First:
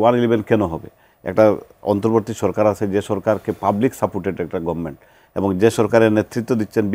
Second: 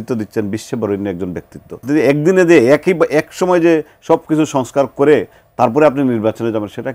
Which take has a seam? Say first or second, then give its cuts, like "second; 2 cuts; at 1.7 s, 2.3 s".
second; 1 cut; at 1.8 s